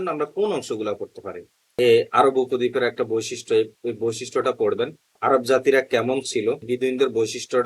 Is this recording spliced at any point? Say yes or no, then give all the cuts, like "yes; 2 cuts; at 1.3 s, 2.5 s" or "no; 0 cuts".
yes; 2 cuts; at 1.7 s, 6.6 s